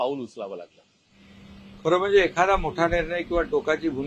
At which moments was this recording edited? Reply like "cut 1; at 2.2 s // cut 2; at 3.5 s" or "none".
none